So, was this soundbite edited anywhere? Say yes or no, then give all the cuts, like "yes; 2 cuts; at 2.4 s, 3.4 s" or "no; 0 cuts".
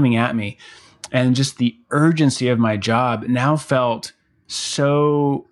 no; 0 cuts